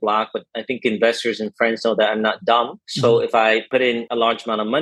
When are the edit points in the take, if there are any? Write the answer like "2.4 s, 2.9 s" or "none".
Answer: 2.8 s, 3.7 s